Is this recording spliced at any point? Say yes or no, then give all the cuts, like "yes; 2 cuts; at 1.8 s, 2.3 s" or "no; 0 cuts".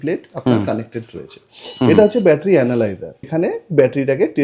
yes; 1 cut; at 3.2 s